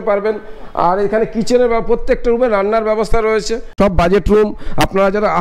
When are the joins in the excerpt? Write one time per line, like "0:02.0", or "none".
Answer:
0:03.7